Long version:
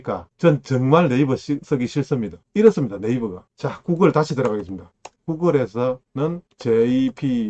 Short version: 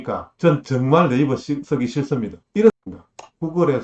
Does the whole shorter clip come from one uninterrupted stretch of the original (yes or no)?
no